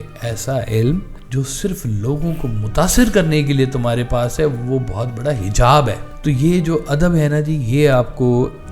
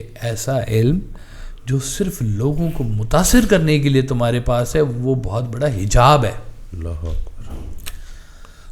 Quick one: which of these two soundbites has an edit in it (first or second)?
first